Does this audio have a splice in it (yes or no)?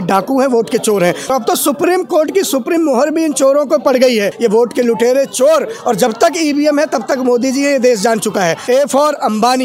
yes